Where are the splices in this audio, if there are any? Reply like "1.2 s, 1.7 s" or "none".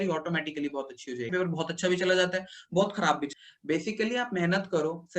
1.3 s, 3.3 s